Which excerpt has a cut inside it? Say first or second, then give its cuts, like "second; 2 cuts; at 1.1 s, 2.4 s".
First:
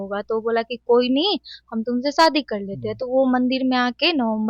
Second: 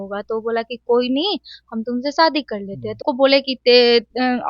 second; 1 cut; at 3.0 s